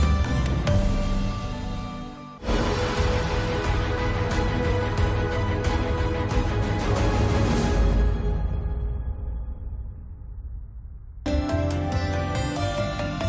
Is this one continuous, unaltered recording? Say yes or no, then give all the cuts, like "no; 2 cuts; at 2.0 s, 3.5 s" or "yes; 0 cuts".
yes; 0 cuts